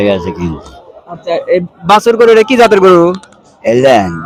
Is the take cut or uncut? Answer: uncut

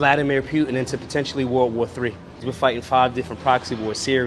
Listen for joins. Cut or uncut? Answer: uncut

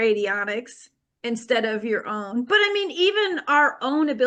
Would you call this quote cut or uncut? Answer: uncut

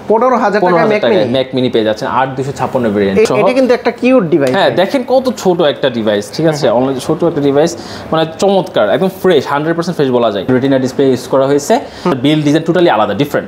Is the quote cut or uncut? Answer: cut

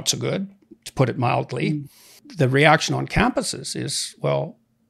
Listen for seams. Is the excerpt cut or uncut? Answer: cut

